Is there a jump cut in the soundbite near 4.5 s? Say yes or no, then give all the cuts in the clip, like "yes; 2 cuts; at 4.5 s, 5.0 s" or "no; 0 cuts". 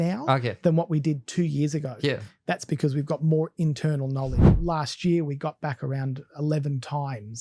yes; 1 cut; at 4.5 s